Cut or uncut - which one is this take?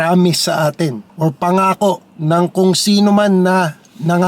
cut